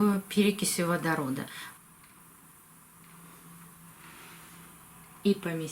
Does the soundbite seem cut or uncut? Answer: cut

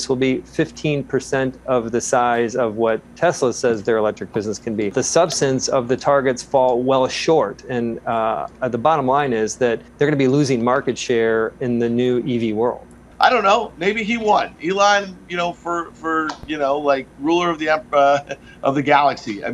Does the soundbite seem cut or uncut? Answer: cut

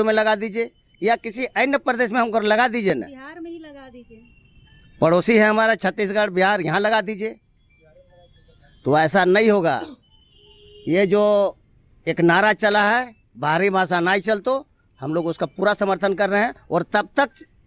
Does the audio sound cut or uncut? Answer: uncut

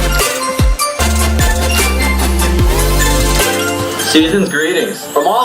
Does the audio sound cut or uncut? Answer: uncut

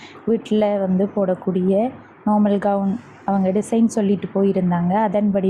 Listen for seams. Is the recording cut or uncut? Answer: uncut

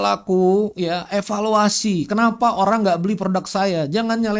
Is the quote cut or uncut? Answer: uncut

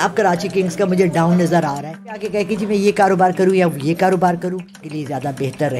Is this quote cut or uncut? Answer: cut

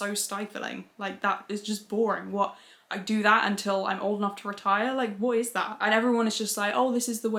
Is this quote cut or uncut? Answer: uncut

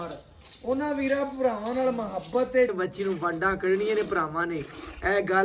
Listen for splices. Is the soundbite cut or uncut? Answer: cut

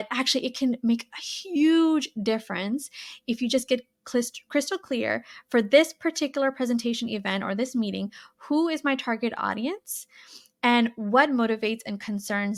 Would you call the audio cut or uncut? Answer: uncut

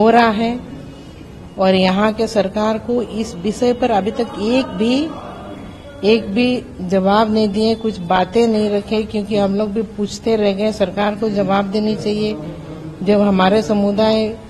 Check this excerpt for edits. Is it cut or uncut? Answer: uncut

